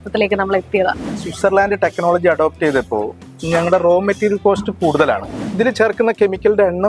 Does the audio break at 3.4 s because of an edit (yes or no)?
no